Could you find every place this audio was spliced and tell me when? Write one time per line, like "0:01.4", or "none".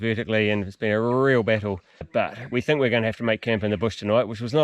0:02.1